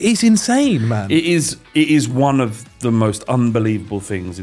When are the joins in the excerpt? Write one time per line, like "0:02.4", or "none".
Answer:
none